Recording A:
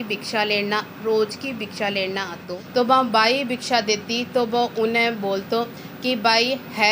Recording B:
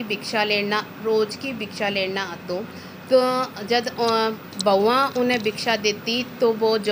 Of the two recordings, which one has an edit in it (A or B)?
A